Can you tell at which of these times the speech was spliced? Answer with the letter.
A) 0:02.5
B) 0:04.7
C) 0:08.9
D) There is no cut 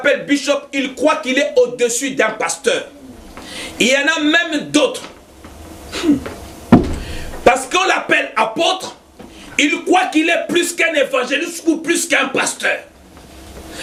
D